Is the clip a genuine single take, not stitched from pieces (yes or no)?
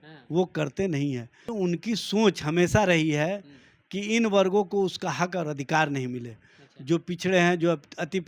no